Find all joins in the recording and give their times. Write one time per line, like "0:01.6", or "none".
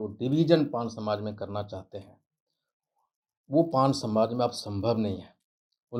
none